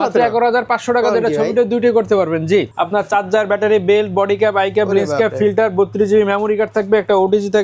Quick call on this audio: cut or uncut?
cut